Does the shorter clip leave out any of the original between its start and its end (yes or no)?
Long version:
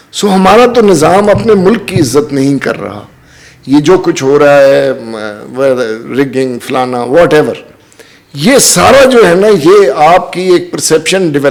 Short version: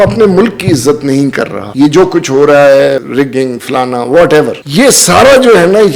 yes